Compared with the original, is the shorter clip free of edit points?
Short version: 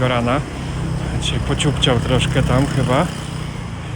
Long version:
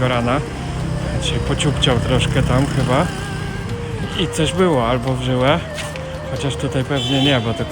yes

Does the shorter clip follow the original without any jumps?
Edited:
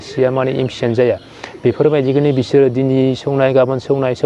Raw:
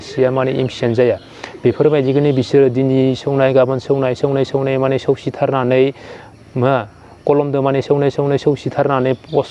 yes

